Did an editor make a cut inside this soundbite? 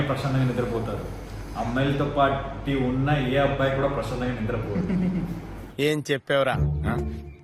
no; 0 cuts

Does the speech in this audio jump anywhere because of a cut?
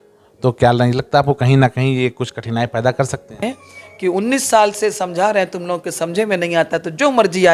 yes; 1 cut; at 3.4 s

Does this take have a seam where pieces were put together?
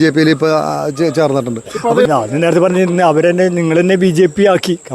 yes; 1 cut; at 2.1 s

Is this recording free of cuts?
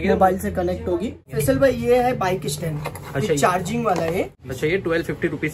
no; 2 cuts; at 1.2 s, 4.4 s

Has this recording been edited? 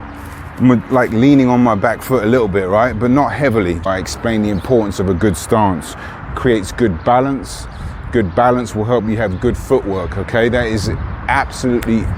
yes; 1 cut; at 3.8 s

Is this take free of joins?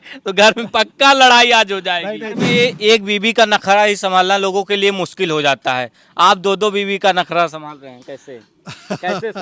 no; 1 cut; at 2.3 s

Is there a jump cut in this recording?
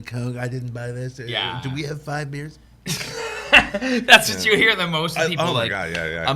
no; 0 cuts

